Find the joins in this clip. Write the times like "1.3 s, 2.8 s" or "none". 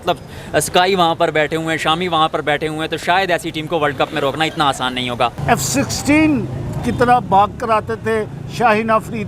5.4 s